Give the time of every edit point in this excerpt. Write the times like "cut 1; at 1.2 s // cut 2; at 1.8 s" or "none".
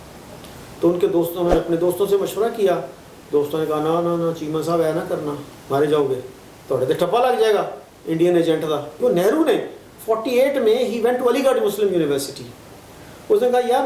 cut 1; at 8.9 s